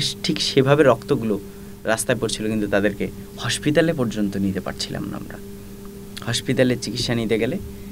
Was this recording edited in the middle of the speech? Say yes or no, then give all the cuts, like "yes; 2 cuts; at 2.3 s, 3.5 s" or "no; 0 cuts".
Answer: no; 0 cuts